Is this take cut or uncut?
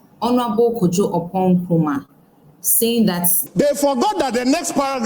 cut